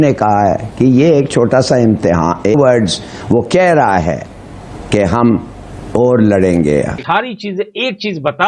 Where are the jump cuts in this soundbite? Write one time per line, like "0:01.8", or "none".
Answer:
0:06.9